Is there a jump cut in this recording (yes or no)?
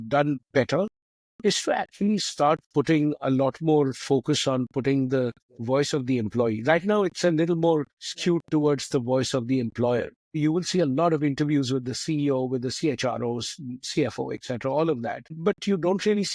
yes